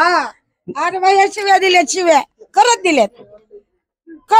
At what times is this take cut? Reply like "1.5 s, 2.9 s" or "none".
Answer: none